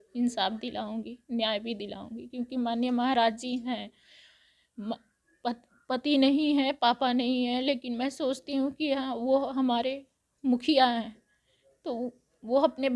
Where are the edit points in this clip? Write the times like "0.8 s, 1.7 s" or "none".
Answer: none